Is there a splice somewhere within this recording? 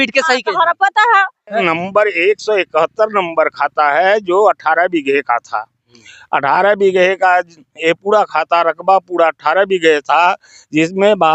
yes; 1 cut; at 1.6 s

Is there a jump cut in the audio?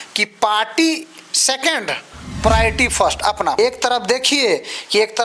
yes; 1 cut; at 3.6 s

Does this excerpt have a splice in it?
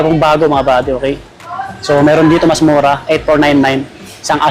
no; 0 cuts

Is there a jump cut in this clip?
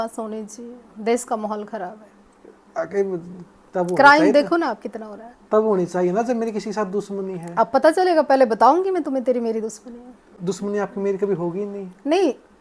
no; 0 cuts

